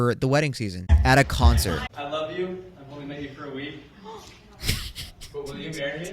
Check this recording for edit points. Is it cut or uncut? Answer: cut